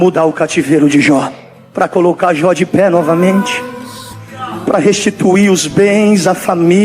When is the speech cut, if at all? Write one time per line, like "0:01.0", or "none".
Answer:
0:01.4